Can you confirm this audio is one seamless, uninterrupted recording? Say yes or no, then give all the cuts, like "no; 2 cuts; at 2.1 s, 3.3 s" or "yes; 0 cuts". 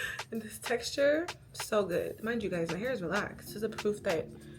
no; 2 cuts; at 2.1 s, 3.4 s